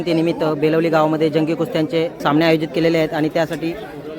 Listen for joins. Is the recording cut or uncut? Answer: cut